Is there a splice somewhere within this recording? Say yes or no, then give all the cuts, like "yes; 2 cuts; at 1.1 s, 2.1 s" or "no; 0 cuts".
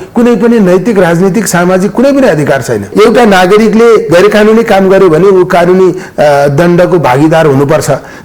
yes; 1 cut; at 2.9 s